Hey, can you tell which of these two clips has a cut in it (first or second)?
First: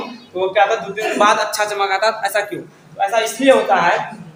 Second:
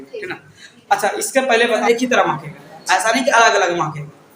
second